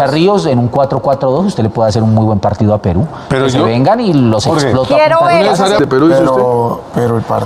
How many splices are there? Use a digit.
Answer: 1